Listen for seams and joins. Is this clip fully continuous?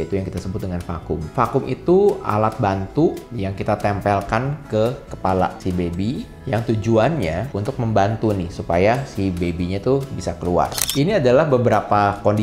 no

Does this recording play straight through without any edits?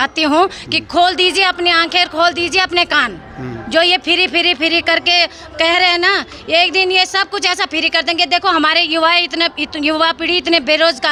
yes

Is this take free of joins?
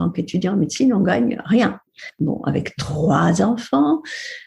no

